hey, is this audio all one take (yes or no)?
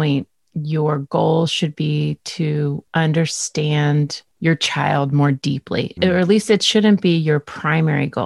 no